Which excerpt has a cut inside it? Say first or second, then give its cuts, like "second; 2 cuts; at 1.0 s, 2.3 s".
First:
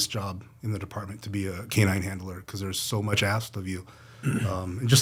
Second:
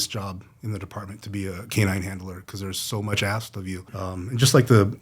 second; 1 cut; at 4.0 s